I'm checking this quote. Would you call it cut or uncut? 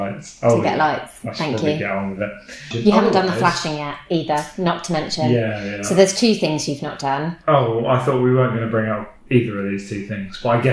cut